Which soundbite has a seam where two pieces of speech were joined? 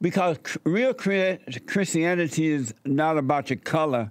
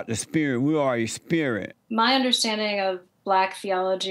second; 1 cut; at 1.7 s

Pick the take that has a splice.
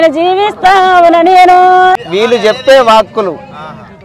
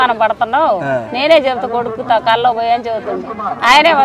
first; 1 cut; at 2.1 s

